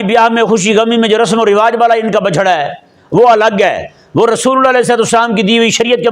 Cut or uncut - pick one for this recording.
uncut